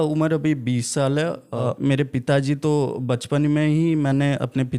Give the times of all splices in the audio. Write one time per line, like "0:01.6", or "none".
0:01.6